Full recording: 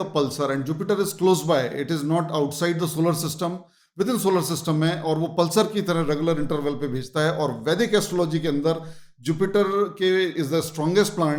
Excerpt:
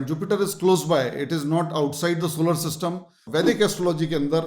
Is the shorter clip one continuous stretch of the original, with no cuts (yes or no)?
no